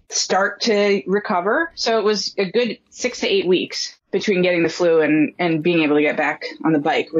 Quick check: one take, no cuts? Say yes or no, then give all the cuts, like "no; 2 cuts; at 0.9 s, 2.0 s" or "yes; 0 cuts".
yes; 0 cuts